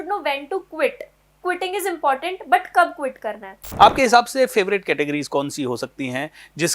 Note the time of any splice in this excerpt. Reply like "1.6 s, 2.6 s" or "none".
3.6 s

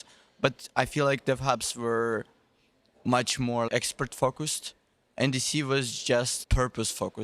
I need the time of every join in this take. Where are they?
3.7 s, 6.4 s

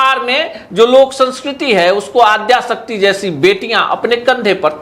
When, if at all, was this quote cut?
none

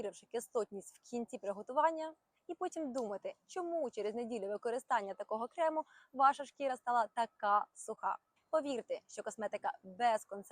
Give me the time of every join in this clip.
2.2 s, 8.3 s

